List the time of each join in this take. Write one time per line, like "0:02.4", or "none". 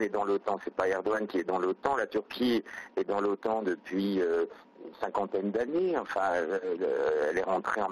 0:07.0